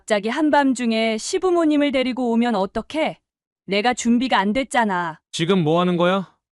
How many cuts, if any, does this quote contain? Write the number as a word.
one